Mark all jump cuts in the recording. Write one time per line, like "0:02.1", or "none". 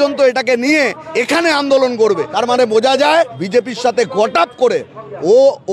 0:01.0
0:02.3
0:03.4